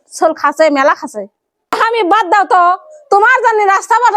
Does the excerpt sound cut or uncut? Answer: cut